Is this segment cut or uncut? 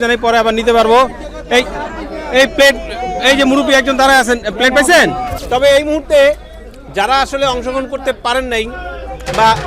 cut